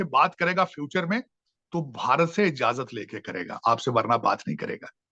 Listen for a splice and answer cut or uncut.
uncut